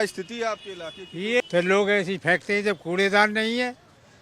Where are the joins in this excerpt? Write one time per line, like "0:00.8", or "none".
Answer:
0:01.4